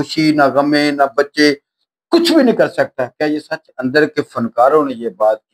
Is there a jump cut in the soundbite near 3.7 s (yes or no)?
yes